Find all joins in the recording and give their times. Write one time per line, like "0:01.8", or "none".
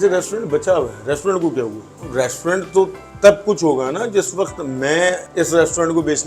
0:02.0
0:05.2